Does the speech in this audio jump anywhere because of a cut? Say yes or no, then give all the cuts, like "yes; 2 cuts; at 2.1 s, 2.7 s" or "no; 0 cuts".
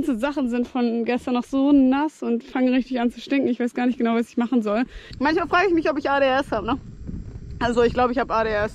yes; 1 cut; at 5.0 s